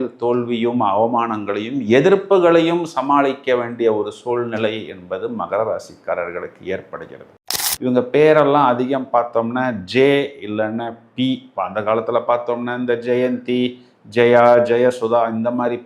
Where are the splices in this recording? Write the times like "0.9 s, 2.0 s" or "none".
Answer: 7.4 s